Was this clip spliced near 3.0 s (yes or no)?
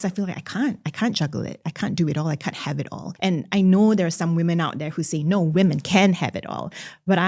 yes